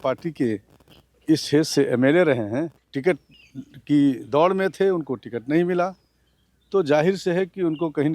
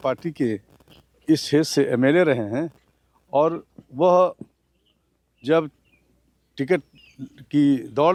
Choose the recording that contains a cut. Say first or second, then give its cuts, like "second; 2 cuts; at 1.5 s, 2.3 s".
first; 1 cut; at 2.8 s